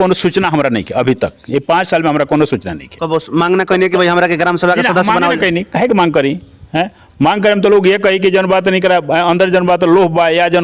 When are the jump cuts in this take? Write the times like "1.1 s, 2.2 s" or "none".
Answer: none